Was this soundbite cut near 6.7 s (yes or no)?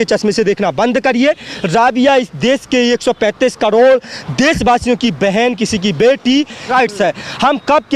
yes